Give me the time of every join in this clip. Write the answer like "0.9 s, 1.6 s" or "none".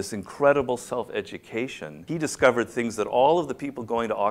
1.9 s

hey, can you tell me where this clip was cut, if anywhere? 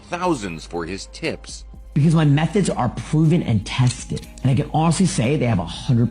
2.0 s

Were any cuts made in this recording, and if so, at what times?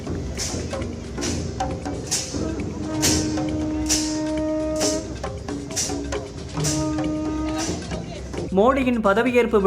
8.5 s

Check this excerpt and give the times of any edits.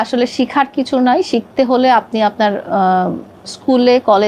none

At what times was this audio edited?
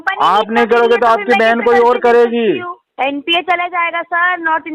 2.8 s

